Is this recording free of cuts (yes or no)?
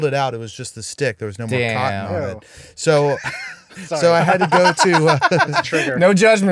yes